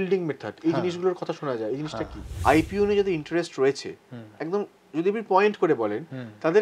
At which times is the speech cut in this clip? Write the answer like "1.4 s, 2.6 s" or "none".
2.3 s